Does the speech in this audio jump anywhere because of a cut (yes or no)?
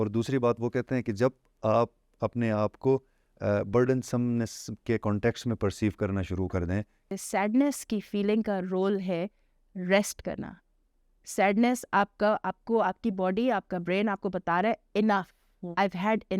yes